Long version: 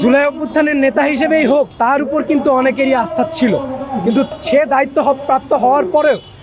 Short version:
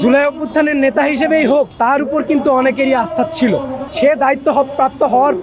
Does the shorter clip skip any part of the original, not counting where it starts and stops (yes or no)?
yes